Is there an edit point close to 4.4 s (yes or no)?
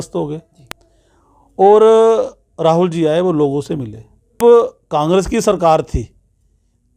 yes